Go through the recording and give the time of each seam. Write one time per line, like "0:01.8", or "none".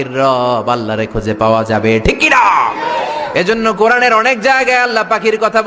none